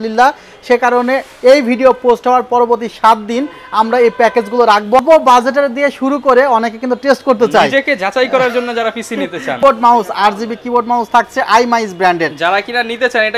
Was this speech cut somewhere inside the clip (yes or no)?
yes